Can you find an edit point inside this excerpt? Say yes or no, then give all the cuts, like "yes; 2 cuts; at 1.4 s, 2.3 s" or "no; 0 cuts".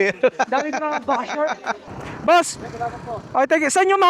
yes; 1 cut; at 1.9 s